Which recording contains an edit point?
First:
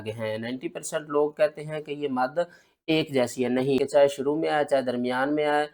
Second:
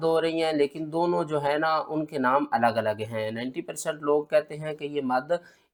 first; 1 cut; at 3.8 s

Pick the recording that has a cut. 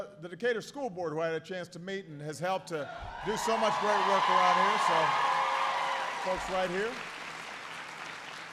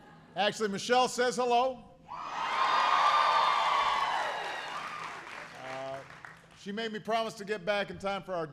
second; 1 cut; at 1.4 s

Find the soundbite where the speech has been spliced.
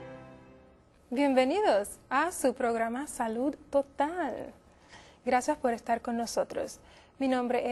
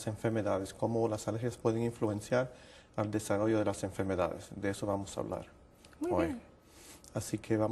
second; 1 cut; at 3.0 s

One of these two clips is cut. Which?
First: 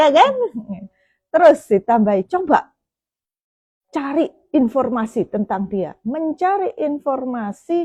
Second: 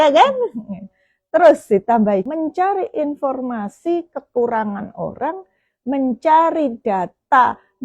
second; 1 cut; at 2.3 s

